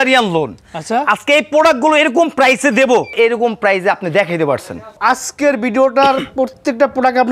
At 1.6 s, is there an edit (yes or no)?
no